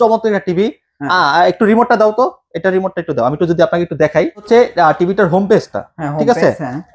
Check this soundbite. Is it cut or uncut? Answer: cut